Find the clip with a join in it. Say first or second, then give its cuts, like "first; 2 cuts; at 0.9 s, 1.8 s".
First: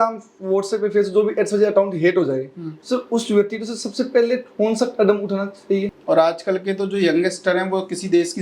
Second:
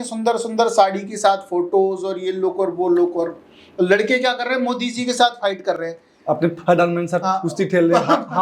first; 1 cut; at 5.9 s